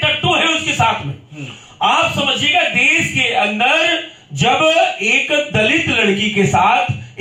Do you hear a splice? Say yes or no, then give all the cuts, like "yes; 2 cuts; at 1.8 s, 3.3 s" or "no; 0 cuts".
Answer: no; 0 cuts